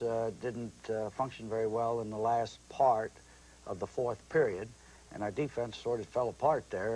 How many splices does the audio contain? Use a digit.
1